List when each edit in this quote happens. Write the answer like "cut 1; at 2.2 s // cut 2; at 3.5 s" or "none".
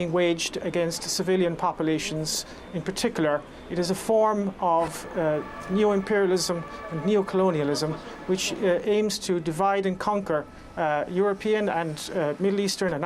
cut 1; at 5.1 s